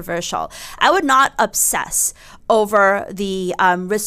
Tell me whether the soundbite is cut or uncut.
uncut